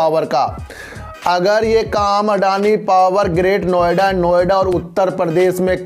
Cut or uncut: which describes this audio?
uncut